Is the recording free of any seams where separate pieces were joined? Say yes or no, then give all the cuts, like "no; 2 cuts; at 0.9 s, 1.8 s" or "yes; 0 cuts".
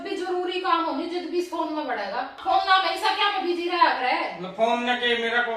no; 1 cut; at 2.4 s